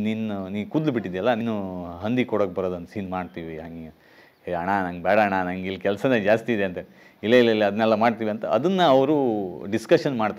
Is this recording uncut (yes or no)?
no